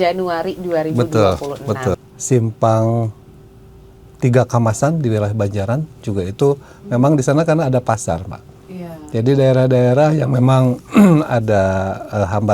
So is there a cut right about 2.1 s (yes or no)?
yes